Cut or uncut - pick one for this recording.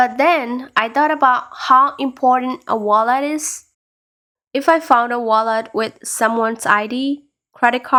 uncut